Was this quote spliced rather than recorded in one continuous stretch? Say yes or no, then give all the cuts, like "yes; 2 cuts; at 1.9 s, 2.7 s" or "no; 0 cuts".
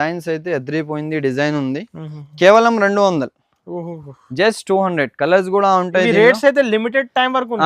no; 0 cuts